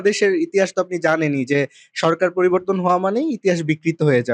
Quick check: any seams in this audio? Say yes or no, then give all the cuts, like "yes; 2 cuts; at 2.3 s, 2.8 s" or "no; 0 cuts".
no; 0 cuts